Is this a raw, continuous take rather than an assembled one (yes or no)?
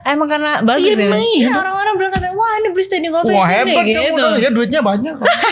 no